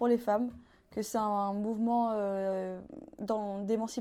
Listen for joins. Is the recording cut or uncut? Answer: uncut